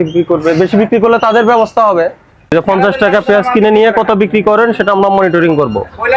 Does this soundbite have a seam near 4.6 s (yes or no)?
no